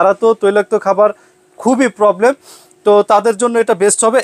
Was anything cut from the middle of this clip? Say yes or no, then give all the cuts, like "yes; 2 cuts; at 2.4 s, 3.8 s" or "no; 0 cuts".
no; 0 cuts